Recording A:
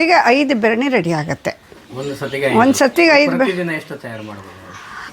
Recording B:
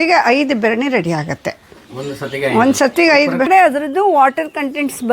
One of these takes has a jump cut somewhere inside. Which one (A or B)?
B